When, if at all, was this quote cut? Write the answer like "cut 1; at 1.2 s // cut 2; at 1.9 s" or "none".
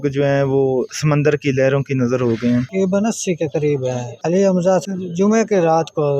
cut 1; at 0.9 s // cut 2; at 2.7 s // cut 3; at 4.1 s // cut 4; at 4.8 s

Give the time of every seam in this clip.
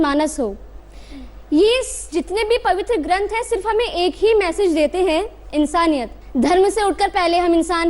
cut 1; at 6.2 s

